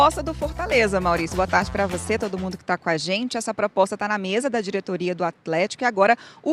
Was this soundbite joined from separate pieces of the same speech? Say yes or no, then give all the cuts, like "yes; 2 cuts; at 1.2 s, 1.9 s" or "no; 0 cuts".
no; 0 cuts